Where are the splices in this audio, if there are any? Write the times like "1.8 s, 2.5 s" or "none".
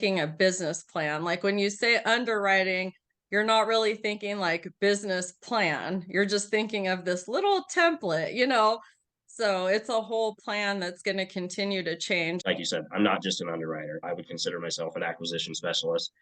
12.4 s